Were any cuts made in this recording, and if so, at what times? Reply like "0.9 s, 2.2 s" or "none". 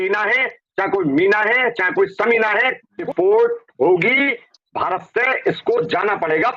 2.9 s

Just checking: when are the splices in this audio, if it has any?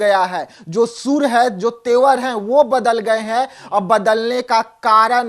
none

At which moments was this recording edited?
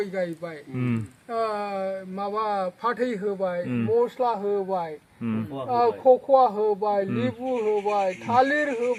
none

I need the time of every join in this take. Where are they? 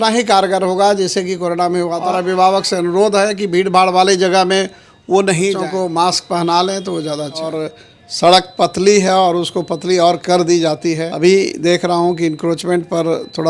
2.1 s, 5.6 s, 7.7 s, 11.1 s

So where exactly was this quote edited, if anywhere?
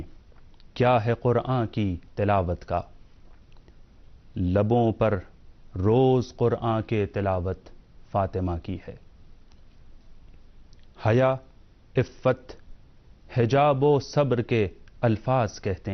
3.2 s

